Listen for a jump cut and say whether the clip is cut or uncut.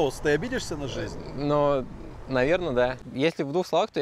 cut